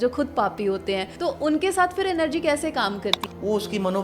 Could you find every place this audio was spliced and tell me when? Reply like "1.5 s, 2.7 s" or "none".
1.1 s, 3.2 s